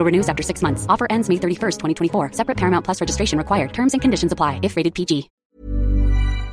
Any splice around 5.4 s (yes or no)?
yes